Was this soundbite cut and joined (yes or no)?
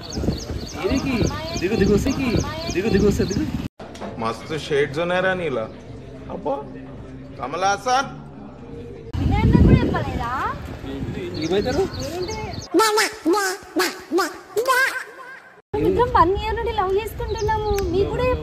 no